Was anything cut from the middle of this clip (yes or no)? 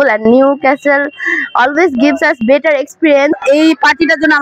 yes